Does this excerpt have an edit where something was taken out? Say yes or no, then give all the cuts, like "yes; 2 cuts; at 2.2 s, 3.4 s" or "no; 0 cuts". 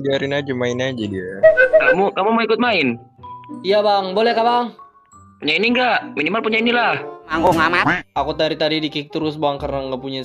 yes; 1 cut; at 8.0 s